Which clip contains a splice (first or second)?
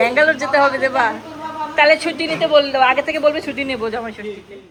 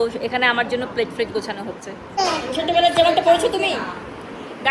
second